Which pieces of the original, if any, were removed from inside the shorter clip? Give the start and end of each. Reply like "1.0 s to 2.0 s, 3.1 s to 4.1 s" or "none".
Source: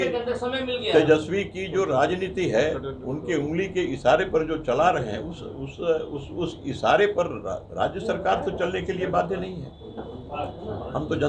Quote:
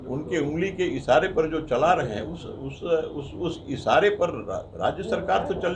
none